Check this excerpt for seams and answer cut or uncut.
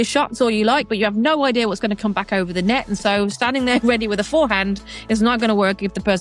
uncut